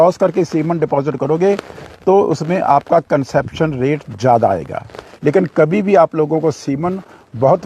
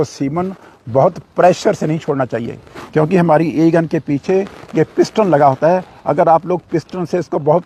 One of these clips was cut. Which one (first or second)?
first